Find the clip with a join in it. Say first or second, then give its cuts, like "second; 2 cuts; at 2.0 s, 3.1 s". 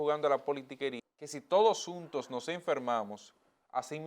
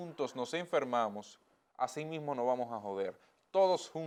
first; 1 cut; at 1.0 s